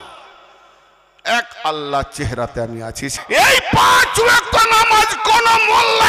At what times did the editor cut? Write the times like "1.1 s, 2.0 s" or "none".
3.1 s